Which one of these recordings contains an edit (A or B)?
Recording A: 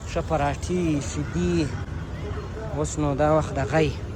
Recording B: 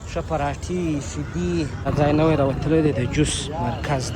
B